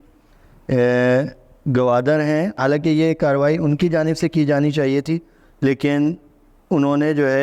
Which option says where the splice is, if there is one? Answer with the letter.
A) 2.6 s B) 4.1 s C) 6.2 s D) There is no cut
A